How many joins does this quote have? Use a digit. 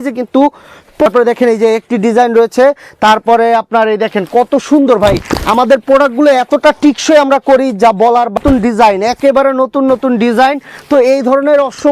2